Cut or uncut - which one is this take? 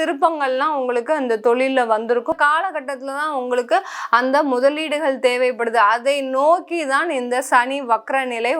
cut